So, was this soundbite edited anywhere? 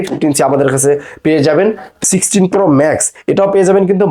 yes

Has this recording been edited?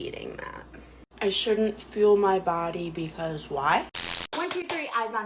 yes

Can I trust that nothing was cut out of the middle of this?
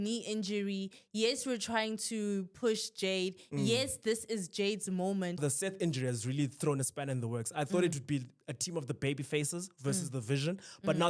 no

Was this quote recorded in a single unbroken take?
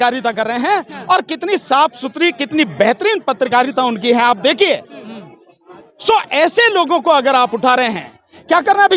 yes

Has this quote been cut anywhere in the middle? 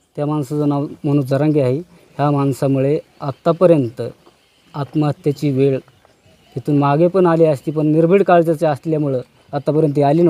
no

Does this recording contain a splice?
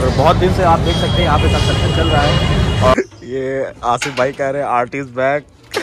yes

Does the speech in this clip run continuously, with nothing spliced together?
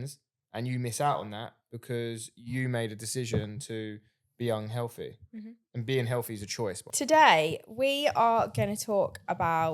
no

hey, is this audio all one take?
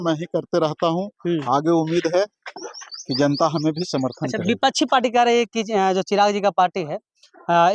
yes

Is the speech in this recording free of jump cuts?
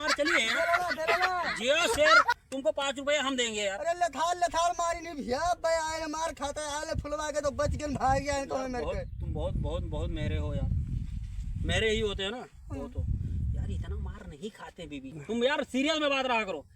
yes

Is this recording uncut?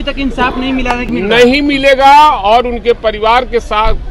no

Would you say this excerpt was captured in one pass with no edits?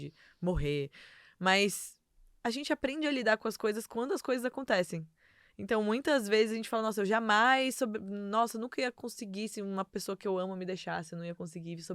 yes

